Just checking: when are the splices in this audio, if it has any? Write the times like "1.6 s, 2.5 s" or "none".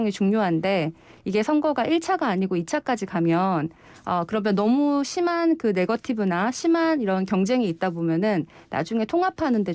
none